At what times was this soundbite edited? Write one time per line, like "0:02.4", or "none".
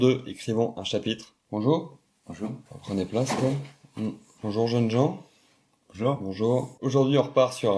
0:01.3
0:02.6
0:04.3
0:06.8